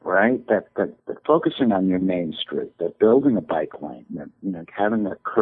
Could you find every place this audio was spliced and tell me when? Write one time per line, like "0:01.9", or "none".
0:01.1